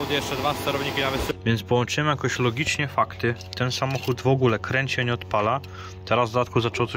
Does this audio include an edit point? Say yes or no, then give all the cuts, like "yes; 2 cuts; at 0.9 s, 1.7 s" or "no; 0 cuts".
yes; 1 cut; at 1.3 s